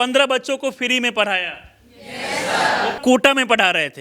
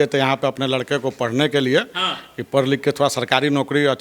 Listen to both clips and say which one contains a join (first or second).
first